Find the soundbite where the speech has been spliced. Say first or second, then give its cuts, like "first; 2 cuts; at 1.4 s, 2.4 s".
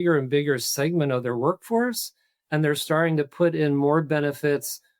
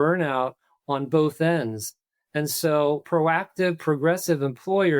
second; 1 cut; at 3.0 s